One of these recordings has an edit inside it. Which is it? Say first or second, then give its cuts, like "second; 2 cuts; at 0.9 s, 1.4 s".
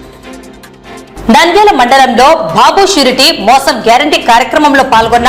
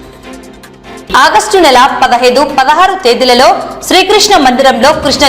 second; 1 cut; at 1.0 s